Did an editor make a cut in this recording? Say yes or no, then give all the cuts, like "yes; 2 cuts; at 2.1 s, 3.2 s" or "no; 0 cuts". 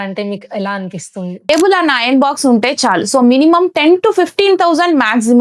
yes; 1 cut; at 1.5 s